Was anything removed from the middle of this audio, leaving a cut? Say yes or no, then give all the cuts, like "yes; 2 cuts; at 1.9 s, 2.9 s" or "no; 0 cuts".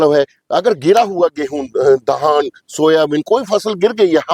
no; 0 cuts